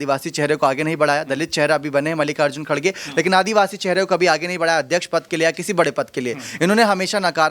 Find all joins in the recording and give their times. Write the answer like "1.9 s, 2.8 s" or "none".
none